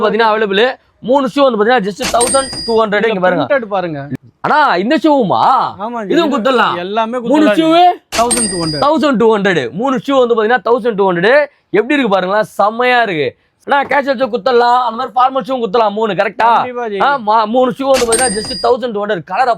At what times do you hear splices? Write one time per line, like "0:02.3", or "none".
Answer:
0:04.0
0:13.5